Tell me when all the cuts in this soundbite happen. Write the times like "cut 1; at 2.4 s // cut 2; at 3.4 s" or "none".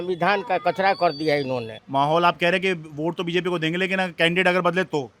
cut 1; at 1.8 s